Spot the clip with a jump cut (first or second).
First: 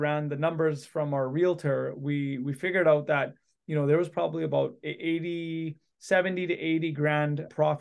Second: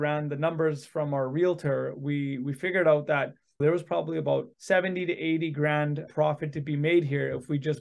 second